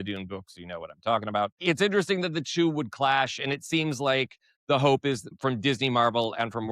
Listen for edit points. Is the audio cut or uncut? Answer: cut